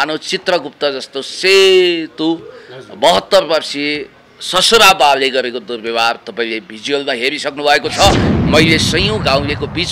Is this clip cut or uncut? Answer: cut